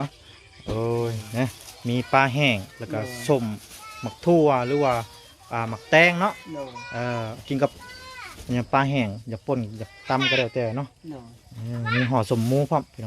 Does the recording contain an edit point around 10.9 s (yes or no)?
no